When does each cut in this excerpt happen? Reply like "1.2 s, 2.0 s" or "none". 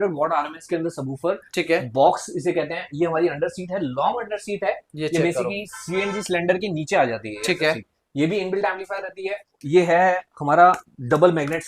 9.6 s